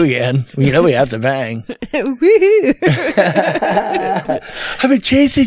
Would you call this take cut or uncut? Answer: uncut